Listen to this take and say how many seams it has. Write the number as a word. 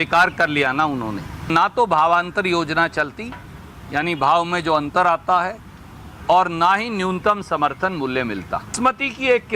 two